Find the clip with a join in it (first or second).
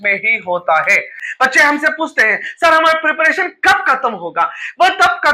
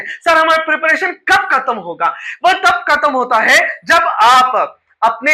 first